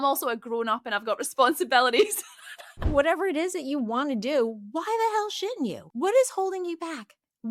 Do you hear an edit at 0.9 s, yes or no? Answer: no